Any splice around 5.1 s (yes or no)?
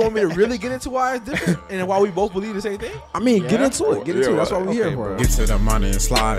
yes